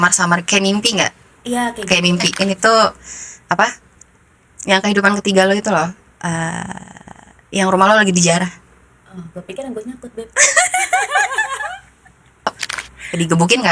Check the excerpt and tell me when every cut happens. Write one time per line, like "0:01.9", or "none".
0:02.3
0:12.5